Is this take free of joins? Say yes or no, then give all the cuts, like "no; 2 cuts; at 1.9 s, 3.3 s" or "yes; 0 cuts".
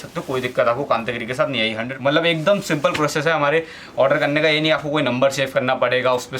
no; 1 cut; at 1.9 s